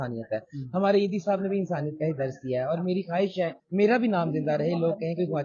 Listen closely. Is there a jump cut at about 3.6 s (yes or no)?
yes